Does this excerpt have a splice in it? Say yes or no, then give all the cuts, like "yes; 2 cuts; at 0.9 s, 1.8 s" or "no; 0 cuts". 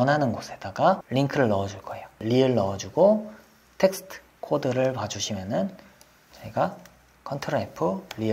yes; 2 cuts; at 1.0 s, 2.2 s